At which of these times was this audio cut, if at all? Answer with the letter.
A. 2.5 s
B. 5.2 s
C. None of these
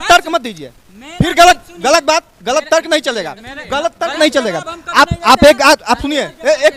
C